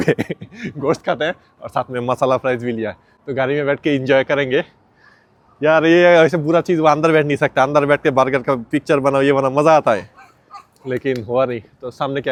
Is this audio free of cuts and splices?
yes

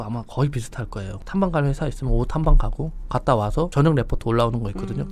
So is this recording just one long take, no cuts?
no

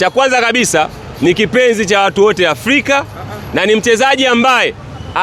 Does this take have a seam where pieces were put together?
no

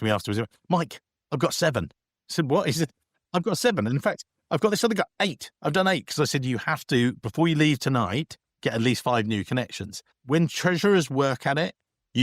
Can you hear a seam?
no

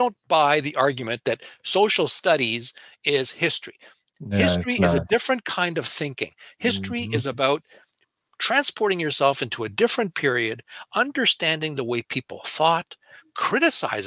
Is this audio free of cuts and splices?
yes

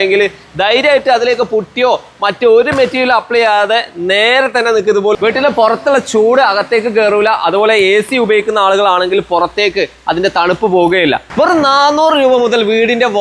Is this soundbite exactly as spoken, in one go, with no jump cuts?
no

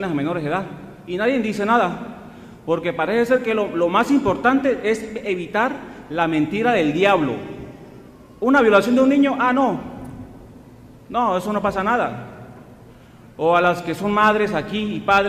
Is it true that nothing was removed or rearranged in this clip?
yes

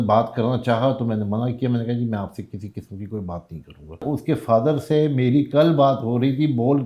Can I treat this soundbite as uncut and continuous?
no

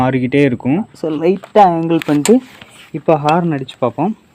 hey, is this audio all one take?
no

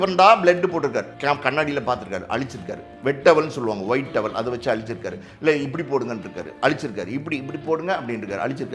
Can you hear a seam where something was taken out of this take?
yes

